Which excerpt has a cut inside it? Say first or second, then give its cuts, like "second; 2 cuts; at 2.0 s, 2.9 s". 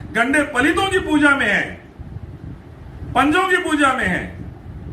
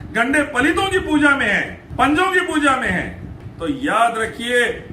second; 2 cuts; at 1.8 s, 3.4 s